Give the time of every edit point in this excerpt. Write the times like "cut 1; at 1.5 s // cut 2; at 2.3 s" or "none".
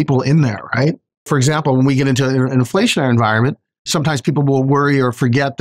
cut 1; at 1.3 s